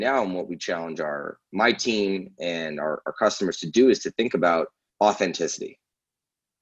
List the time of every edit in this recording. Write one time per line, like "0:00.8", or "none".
0:04.8

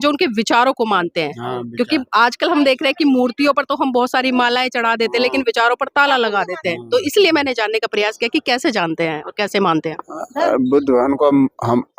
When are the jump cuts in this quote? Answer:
none

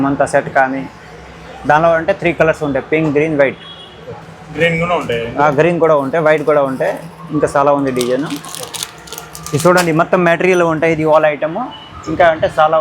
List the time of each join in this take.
none

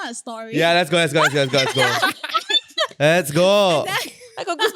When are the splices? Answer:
none

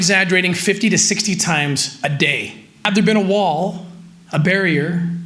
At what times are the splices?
0:02.9

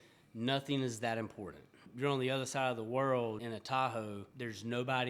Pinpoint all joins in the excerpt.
0:01.9
0:03.4
0:04.3

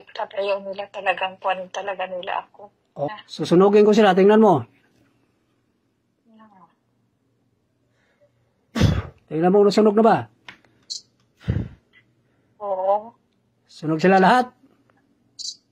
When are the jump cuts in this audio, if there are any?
0:03.1

